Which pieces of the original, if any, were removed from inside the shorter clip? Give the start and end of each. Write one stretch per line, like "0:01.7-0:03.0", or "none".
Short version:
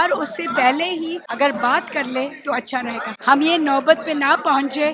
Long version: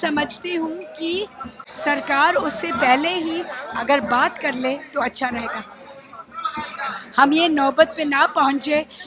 0:03.5-0:03.7
0:05.6-0:07.0